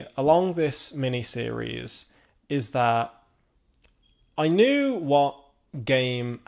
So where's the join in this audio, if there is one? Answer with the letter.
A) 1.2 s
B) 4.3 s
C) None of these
C